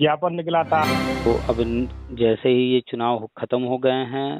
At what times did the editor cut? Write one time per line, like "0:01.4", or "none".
0:01.3